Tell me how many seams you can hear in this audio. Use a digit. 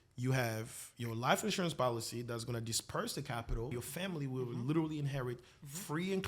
1